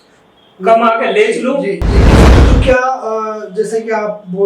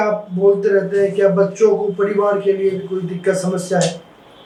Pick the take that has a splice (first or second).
first